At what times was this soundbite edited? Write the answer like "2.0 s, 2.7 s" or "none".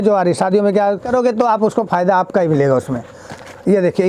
1.0 s